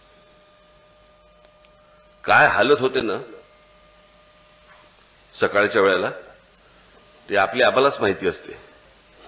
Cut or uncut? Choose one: uncut